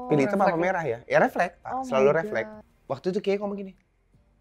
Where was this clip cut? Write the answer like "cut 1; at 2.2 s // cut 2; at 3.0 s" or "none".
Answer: cut 1; at 2.6 s